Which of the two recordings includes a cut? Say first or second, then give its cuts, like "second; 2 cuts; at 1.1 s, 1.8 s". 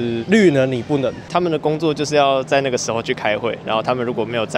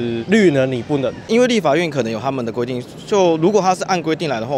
first; 1 cut; at 1.2 s